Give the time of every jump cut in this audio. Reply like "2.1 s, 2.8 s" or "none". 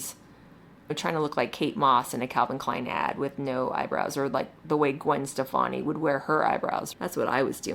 0.9 s

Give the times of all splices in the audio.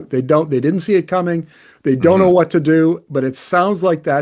none

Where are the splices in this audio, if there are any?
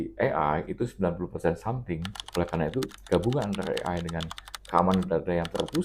2.2 s

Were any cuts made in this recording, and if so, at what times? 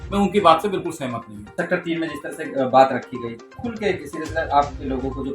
1.6 s

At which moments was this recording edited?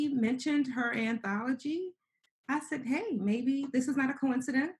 none

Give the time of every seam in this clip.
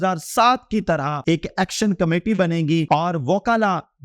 1.1 s, 2.8 s

